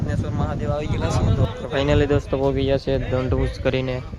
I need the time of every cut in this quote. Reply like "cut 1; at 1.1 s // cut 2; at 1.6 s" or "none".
cut 1; at 1.4 s